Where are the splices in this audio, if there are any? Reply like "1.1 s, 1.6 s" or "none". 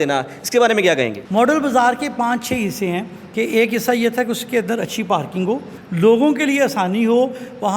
1.2 s, 5.8 s